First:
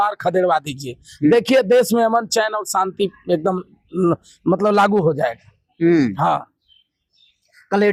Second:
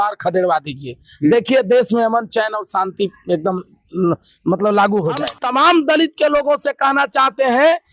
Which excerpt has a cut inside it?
second; 1 cut; at 5.4 s

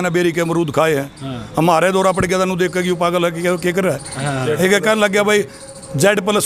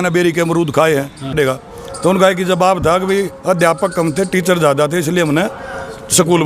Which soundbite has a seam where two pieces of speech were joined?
second; 1 cut; at 1.3 s

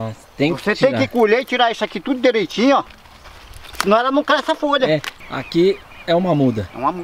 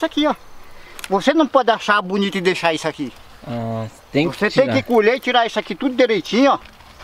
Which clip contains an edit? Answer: first; 1 cut; at 5.1 s

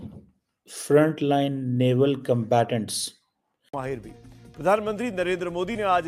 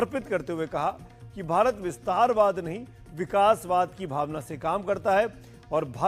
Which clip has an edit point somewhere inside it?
first; 1 cut; at 3.7 s

